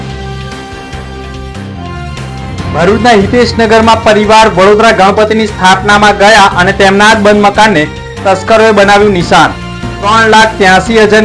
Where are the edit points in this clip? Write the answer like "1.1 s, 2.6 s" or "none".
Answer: 1.5 s

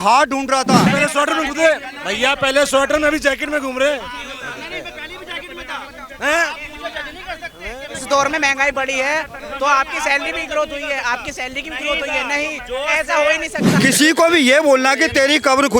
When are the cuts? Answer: 0.9 s, 13.7 s

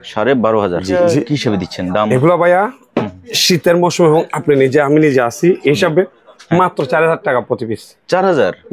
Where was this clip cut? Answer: 1.0 s

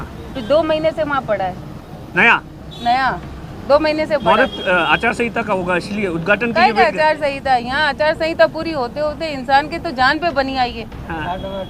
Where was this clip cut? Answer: none

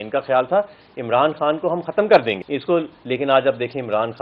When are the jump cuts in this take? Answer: 2.4 s

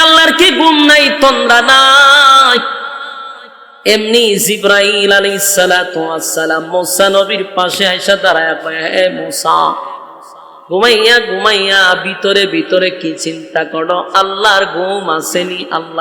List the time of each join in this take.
none

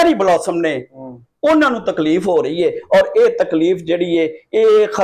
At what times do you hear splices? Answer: none

